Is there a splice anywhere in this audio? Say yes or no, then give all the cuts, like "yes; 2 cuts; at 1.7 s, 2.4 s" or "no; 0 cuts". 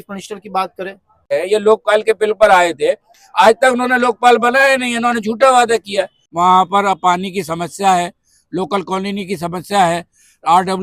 yes; 2 cuts; at 1.3 s, 6.2 s